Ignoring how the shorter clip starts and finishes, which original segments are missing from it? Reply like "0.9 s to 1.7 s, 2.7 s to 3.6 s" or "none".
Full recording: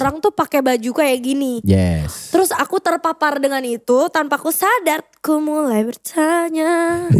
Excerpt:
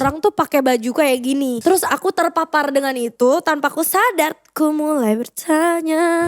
1.6 s to 2.2 s